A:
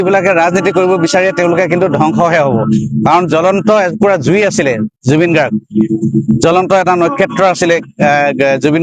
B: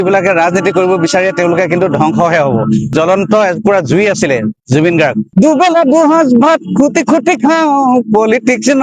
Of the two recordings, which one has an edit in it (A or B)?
B